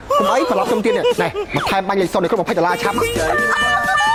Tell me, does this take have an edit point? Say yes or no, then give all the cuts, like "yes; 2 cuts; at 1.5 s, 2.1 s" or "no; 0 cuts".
no; 0 cuts